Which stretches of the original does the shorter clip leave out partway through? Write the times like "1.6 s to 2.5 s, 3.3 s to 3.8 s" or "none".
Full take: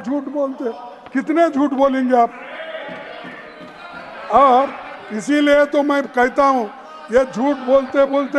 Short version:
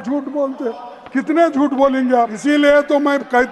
2.3 s to 5.2 s